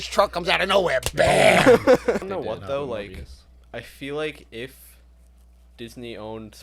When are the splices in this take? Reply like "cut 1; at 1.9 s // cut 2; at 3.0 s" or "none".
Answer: cut 1; at 2.2 s